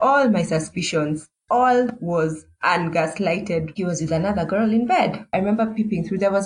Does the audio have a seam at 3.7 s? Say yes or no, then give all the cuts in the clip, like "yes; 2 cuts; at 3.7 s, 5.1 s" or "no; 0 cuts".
yes; 2 cuts; at 3.7 s, 5.2 s